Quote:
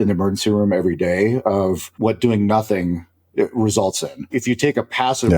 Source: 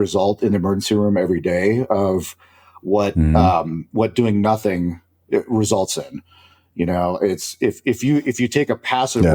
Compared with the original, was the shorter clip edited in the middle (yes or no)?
yes